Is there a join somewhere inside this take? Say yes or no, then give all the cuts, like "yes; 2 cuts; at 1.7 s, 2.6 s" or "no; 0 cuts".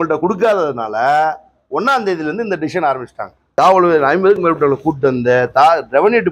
yes; 1 cut; at 3.5 s